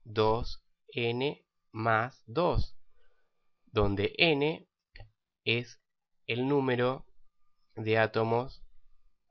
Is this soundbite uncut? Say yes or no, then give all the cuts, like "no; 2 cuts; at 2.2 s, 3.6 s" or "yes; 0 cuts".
no; 1 cut; at 4.3 s